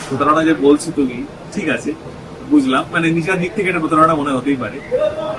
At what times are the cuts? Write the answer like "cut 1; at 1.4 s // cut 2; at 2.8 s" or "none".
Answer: none